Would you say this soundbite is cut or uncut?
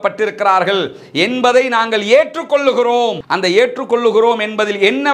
uncut